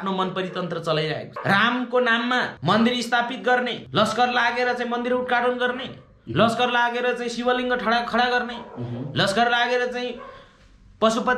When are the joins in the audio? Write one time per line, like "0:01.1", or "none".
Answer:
0:01.3
0:02.5
0:03.8